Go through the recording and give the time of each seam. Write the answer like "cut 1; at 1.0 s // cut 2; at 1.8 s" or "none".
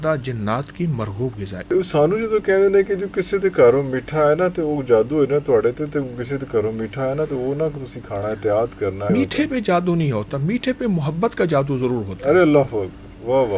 cut 1; at 1.7 s // cut 2; at 9.1 s